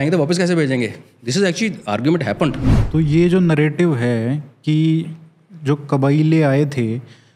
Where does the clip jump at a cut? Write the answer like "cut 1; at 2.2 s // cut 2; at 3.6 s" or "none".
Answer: cut 1; at 2.7 s